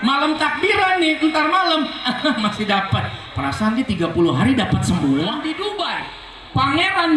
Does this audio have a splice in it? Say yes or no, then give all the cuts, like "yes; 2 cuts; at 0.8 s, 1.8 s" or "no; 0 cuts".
yes; 1 cut; at 5.5 s